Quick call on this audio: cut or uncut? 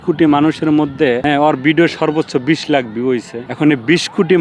cut